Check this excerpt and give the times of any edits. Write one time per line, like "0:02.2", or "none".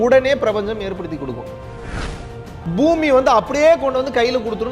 0:02.0